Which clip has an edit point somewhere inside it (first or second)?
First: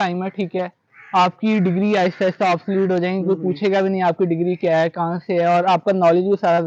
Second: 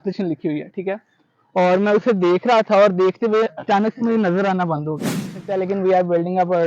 second